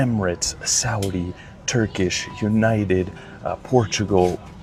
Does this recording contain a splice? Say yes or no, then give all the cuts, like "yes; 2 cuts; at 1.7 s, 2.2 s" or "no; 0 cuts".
no; 0 cuts